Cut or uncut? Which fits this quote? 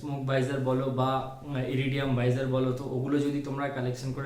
uncut